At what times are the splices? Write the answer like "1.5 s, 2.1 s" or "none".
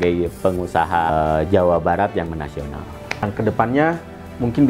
1.1 s, 3.2 s